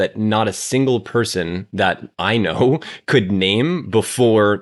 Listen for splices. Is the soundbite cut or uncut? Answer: uncut